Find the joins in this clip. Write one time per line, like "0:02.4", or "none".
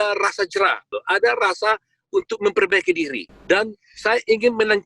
0:00.9
0:03.3